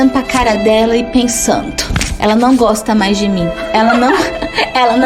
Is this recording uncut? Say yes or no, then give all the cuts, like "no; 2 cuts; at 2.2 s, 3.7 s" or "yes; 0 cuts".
yes; 0 cuts